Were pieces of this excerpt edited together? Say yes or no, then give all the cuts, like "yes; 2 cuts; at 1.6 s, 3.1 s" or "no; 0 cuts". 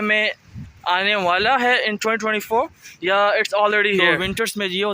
yes; 1 cut; at 4.0 s